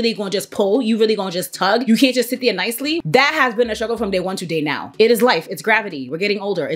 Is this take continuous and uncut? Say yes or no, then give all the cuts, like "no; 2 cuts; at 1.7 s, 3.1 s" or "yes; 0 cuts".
no; 2 cuts; at 3.0 s, 4.9 s